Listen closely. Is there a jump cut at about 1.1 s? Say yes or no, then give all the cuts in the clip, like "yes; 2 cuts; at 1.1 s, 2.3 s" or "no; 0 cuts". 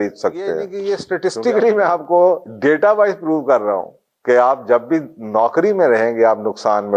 yes; 1 cut; at 1.1 s